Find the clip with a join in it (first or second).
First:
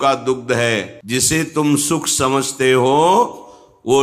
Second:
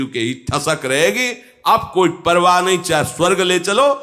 first